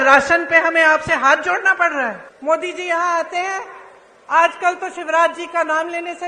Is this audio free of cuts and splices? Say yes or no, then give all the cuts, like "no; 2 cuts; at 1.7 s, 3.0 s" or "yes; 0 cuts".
no; 1 cut; at 2.3 s